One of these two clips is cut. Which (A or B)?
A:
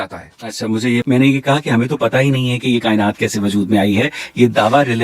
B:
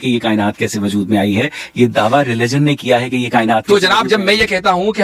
A